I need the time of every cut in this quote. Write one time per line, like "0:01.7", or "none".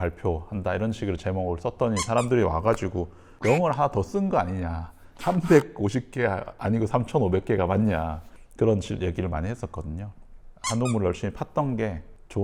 none